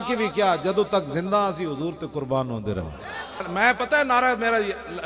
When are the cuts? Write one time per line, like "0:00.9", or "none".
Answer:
0:03.5